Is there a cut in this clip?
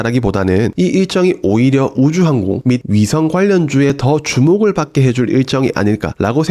no; 0 cuts

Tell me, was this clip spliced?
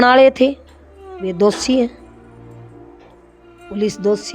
yes; 2 cuts; at 2.1 s, 3.6 s

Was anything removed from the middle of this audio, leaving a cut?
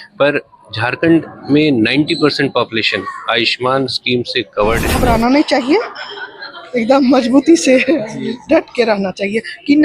yes; 1 cut; at 4.9 s

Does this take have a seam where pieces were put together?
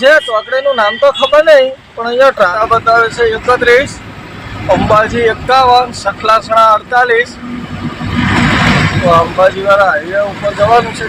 yes; 1 cut; at 2.5 s

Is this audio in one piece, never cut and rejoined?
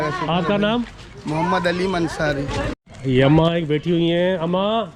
no; 1 cut; at 2.7 s

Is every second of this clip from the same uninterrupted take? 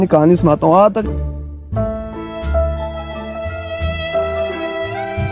yes; 0 cuts

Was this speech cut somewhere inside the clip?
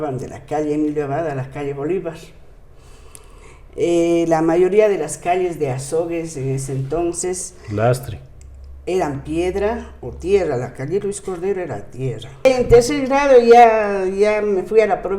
yes; 1 cut; at 12.5 s

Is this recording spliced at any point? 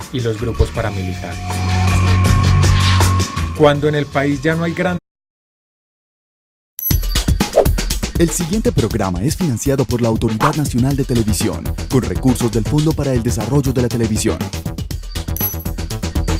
no; 0 cuts

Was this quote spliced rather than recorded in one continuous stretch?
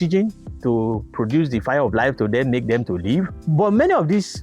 yes; 1 cut; at 3.4 s

